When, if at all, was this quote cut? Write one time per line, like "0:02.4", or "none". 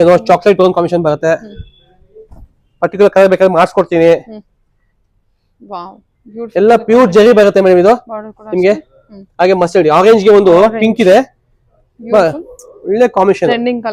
none